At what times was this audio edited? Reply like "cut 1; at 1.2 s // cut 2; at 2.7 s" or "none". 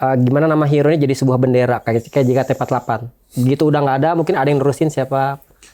none